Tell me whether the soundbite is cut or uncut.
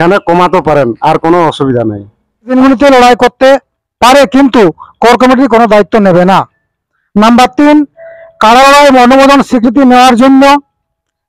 cut